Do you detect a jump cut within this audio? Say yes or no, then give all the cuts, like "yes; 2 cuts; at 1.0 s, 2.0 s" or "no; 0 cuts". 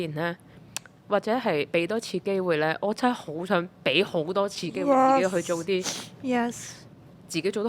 no; 0 cuts